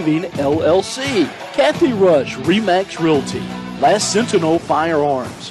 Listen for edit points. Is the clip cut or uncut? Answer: cut